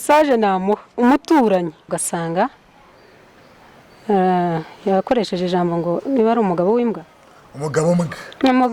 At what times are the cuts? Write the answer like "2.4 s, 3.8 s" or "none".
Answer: 2.0 s